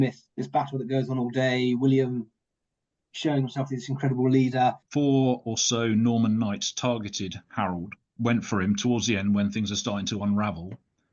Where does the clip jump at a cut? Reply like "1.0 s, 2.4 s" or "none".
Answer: 4.8 s